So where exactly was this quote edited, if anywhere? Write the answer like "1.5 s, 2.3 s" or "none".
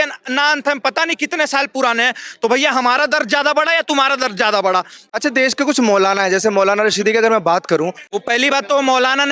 5.0 s, 8.0 s